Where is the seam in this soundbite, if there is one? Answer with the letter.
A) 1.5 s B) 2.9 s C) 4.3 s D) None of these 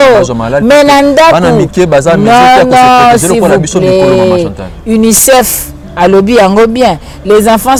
D